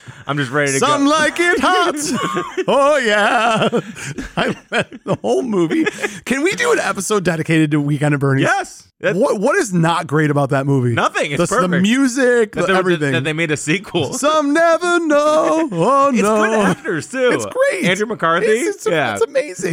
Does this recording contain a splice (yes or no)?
no